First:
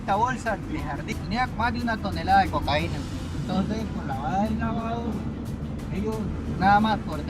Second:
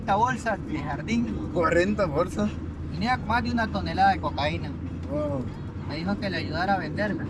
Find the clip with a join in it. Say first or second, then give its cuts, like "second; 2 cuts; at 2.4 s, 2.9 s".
first; 2 cuts; at 1.0 s, 3.3 s